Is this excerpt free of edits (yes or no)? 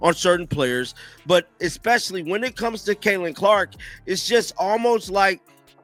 yes